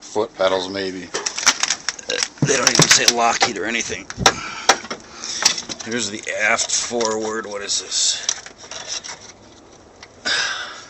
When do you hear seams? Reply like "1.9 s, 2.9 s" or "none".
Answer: none